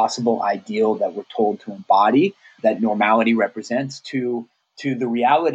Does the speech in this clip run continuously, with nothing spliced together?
no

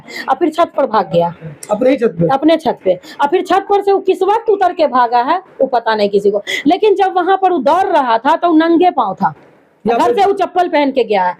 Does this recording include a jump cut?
no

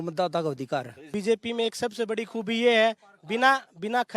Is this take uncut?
no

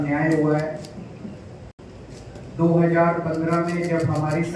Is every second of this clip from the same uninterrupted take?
yes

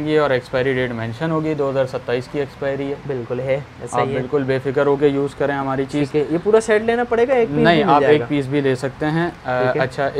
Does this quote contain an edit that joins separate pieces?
no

